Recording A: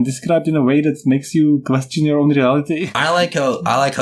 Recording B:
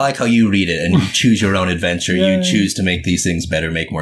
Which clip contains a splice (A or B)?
A